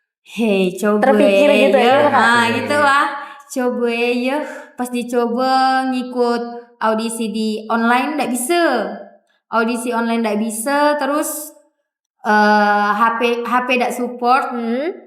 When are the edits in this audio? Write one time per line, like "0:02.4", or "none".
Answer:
none